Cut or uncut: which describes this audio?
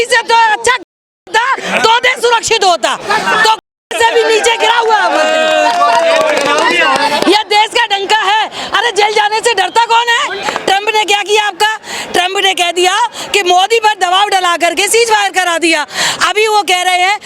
cut